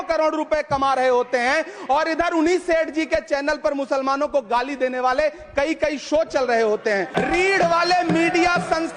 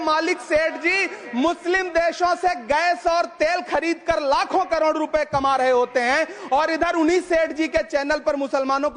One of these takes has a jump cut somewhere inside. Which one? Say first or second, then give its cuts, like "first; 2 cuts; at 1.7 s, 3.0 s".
first; 1 cut; at 7.1 s